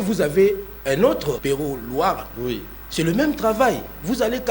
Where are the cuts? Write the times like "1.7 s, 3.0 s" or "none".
1.4 s